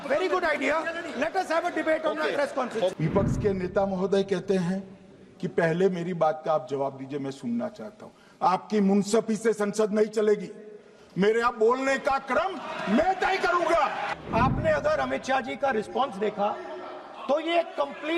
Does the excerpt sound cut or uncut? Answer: cut